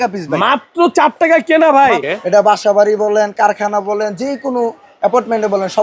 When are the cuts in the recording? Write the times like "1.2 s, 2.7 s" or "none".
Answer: 2.1 s